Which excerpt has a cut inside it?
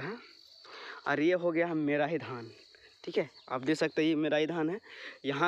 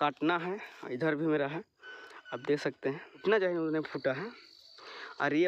second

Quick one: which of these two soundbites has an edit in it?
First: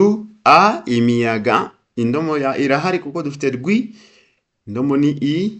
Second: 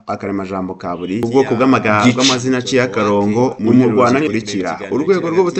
second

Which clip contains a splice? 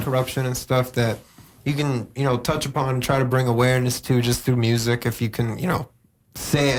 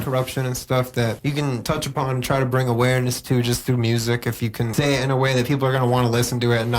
second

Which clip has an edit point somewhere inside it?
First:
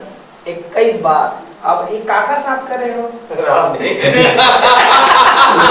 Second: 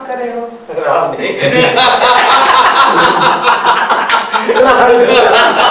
first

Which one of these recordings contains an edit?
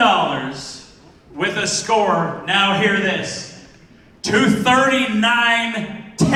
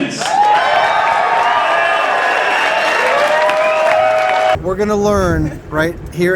second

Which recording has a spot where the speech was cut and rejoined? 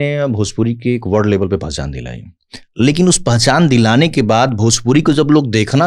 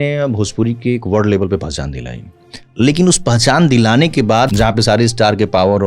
second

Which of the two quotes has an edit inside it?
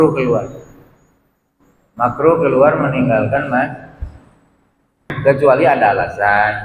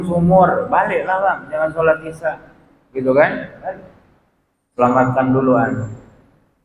first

